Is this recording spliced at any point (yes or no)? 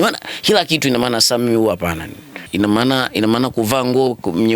yes